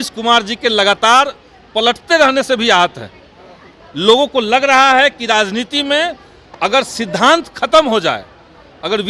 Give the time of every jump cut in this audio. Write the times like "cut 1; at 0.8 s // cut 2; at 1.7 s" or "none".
none

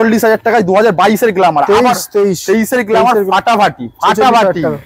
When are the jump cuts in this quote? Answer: none

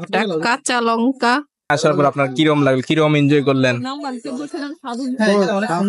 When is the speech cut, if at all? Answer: cut 1; at 1.7 s

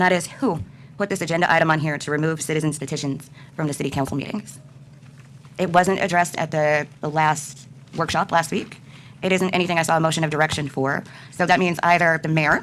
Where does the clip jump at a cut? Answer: none

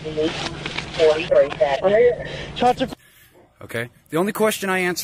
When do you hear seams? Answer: cut 1; at 1.8 s // cut 2; at 2.9 s

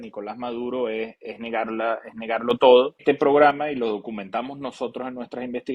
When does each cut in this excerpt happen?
cut 1; at 3.0 s

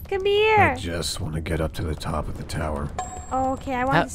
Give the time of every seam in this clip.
none

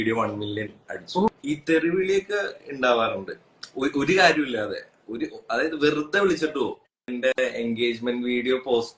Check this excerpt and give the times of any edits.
cut 1; at 1.4 s // cut 2; at 7.1 s

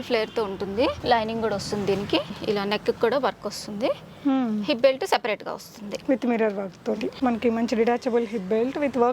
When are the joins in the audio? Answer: cut 1; at 1.0 s // cut 2; at 2.4 s // cut 3; at 7.1 s

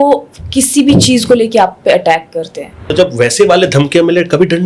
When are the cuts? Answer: cut 1; at 2.9 s

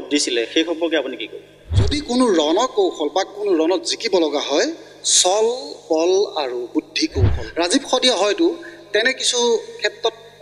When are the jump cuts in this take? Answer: cut 1; at 2.0 s // cut 2; at 7.4 s

